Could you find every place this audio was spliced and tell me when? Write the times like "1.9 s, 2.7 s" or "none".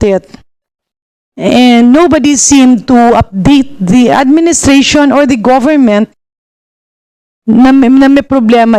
none